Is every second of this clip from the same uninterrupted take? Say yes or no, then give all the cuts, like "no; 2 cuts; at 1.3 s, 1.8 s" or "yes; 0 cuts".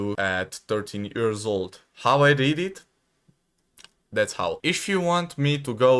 yes; 0 cuts